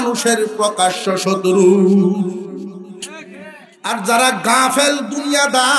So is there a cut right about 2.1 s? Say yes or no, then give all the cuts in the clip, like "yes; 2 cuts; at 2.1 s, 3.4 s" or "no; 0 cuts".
no; 1 cut; at 3.6 s